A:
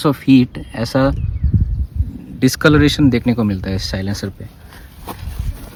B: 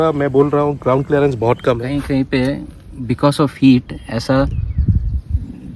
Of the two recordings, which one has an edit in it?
B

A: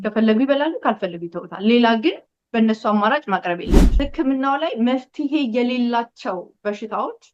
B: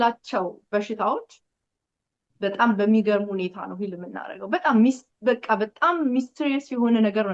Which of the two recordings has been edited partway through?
A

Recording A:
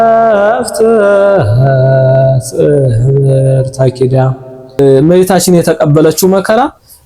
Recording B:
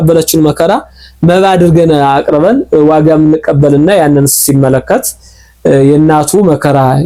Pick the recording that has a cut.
A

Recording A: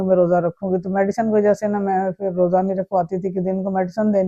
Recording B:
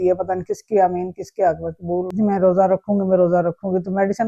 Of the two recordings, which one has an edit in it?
B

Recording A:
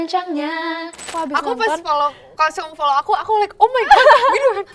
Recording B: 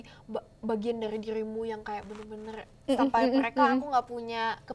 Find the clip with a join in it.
A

